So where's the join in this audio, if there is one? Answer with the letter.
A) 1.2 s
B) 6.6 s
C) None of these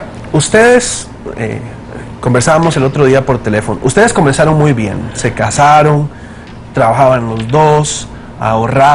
A